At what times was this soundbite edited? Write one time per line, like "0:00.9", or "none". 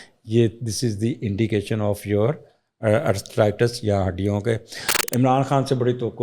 0:04.9